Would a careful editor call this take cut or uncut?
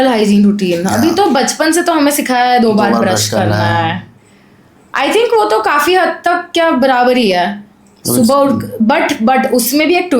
uncut